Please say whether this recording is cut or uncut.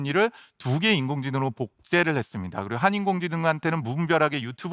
uncut